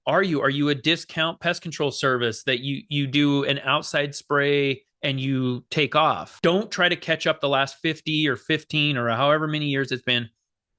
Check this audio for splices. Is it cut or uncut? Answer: cut